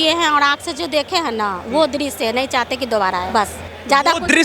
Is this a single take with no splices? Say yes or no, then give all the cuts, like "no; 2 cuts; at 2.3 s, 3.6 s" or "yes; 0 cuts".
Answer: no; 1 cut; at 3.3 s